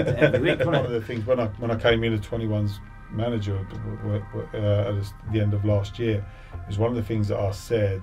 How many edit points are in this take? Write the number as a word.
one